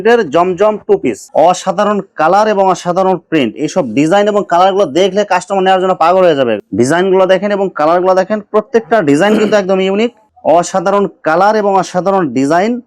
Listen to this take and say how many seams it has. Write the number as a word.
three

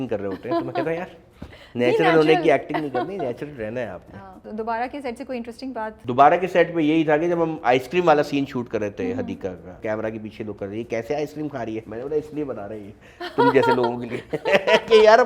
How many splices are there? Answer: three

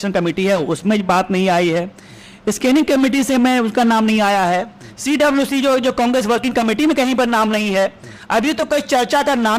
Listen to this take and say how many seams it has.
zero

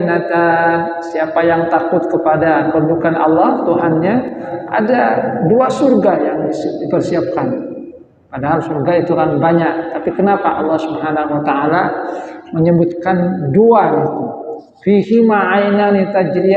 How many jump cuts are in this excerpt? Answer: one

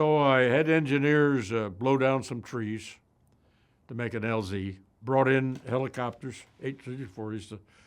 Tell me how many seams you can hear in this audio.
one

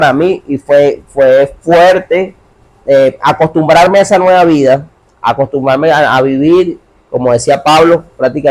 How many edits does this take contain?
zero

